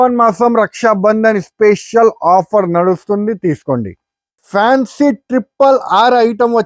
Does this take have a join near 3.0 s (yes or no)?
no